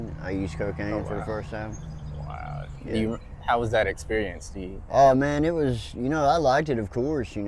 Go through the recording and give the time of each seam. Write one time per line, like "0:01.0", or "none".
none